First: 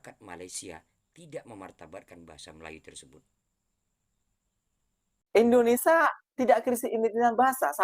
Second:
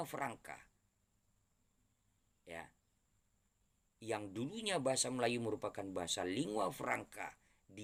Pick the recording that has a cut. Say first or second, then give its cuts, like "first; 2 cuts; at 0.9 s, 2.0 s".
first; 1 cut; at 5.2 s